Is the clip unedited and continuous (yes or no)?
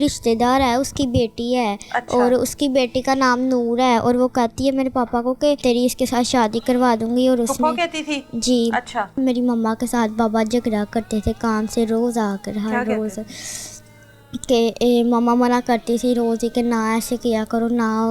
no